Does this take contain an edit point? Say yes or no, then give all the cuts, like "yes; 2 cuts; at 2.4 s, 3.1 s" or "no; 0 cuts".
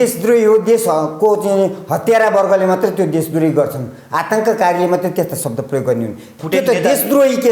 yes; 1 cut; at 6.3 s